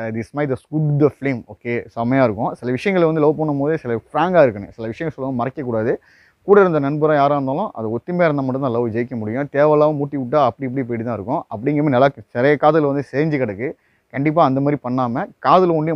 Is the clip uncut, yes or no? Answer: yes